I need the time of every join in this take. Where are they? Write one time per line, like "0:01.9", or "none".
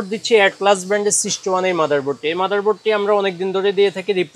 none